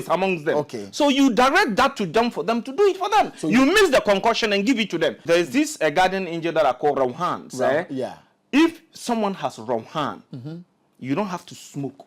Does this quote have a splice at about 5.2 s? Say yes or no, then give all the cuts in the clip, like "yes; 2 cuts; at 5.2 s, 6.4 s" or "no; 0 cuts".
yes; 1 cut; at 5.2 s